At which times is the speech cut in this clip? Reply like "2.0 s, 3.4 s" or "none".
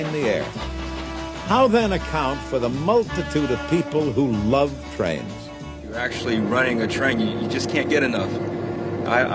2.0 s